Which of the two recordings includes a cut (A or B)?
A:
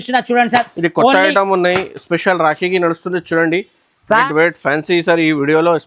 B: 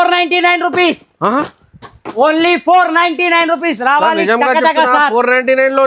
A